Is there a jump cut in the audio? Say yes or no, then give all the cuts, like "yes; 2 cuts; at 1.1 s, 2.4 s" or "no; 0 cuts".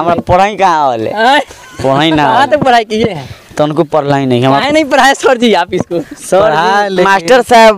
no; 0 cuts